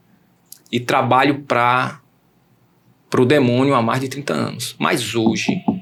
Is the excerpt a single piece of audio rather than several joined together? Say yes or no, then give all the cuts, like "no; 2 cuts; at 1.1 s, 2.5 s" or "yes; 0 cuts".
yes; 0 cuts